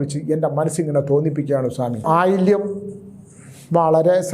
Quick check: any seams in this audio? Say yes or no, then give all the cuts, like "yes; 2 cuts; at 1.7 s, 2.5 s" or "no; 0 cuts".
yes; 1 cut; at 1.9 s